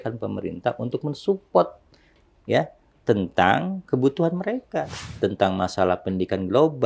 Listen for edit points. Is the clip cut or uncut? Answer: cut